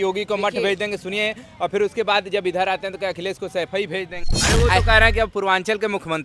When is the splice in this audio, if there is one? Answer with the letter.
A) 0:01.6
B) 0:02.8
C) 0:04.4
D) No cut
C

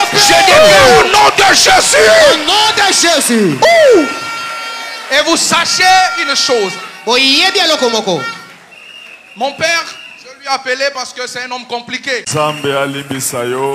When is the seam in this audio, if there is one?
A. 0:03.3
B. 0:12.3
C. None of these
B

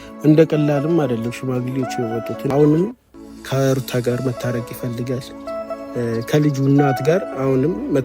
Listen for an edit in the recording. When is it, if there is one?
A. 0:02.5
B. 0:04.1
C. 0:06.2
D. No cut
A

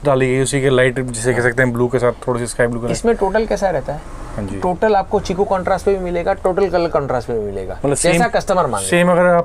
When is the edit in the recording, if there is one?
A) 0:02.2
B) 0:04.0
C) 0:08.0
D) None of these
D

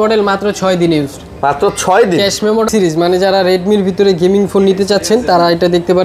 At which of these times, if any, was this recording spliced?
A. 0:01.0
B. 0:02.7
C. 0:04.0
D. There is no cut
B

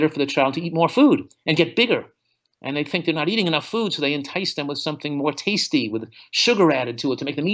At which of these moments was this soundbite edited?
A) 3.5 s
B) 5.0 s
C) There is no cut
C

